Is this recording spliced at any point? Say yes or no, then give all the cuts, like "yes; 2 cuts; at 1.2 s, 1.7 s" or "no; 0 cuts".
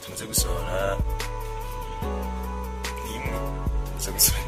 no; 0 cuts